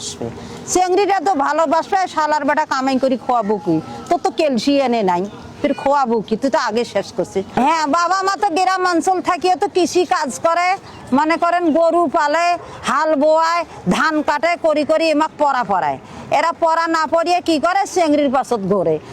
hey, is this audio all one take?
no; 1 cut; at 7.5 s

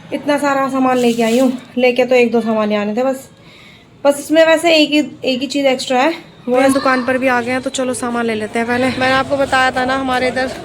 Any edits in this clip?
yes; 2 cuts; at 6.6 s, 9.0 s

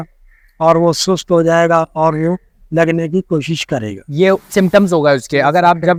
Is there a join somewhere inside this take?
no; 0 cuts

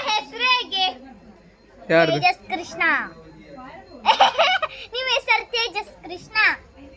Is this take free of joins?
no; 1 cut; at 5.5 s

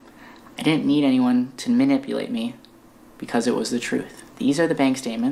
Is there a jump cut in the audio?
no; 0 cuts

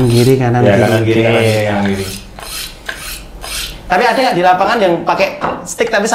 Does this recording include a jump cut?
no; 0 cuts

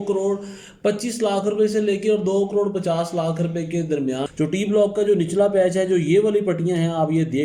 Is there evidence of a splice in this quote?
yes; 1 cut; at 4.3 s

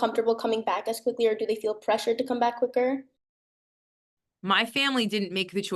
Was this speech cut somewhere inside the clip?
yes; 1 cut; at 3.8 s

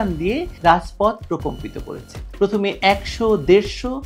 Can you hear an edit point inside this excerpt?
no; 0 cuts

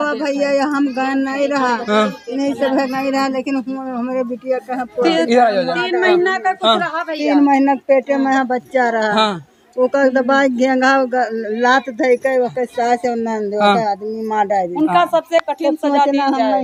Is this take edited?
no; 0 cuts

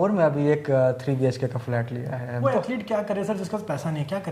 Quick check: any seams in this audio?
yes; 1 cut; at 2.4 s

